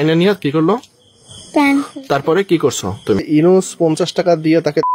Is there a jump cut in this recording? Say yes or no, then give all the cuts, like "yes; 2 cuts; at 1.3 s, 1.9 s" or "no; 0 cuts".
yes; 1 cut; at 3.2 s